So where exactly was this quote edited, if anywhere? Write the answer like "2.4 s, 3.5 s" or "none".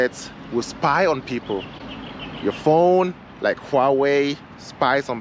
none